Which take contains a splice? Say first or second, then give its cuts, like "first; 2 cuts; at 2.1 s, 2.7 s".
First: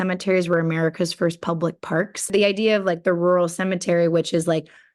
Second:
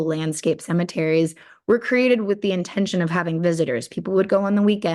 first; 1 cut; at 2.2 s